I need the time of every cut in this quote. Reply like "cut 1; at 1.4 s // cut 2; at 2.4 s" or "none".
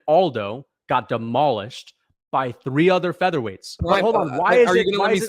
cut 1; at 3.7 s